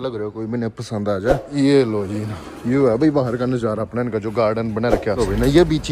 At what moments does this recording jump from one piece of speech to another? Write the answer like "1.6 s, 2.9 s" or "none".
1.5 s, 5.2 s